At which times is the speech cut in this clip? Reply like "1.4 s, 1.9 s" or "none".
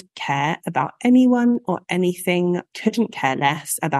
2.7 s